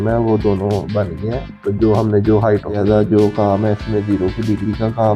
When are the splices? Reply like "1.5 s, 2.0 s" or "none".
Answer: 2.8 s